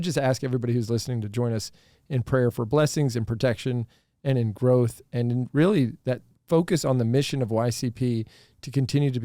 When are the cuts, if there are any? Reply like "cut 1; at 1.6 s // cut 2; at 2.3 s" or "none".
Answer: cut 1; at 6.3 s